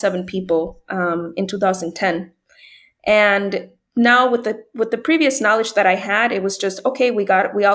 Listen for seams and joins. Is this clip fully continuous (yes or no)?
yes